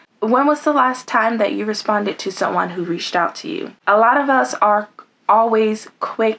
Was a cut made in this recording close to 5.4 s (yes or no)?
no